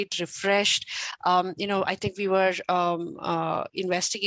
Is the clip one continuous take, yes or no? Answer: yes